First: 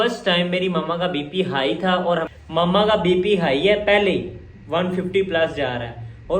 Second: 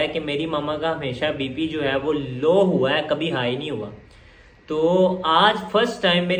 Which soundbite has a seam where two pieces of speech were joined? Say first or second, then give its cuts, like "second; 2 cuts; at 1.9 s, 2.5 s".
first; 1 cut; at 2.3 s